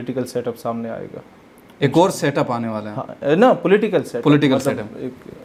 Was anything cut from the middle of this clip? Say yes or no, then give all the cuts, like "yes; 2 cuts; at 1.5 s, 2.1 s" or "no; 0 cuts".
no; 0 cuts